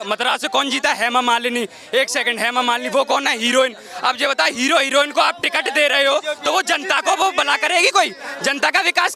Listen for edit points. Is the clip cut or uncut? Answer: uncut